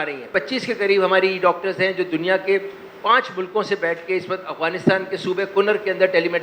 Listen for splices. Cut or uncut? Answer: uncut